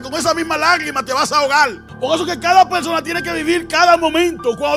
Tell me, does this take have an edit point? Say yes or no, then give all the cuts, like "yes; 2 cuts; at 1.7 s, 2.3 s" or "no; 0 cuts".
yes; 1 cut; at 1.8 s